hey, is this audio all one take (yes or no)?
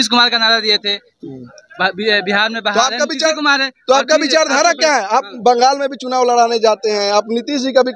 yes